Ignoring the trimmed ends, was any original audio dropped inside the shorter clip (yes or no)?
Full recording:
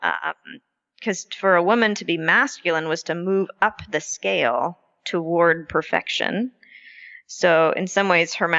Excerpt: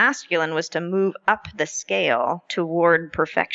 yes